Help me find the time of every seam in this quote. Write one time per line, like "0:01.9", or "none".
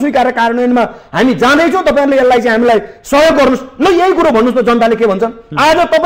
none